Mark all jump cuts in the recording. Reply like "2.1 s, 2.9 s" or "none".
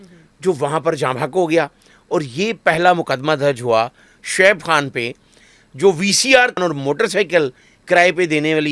6.6 s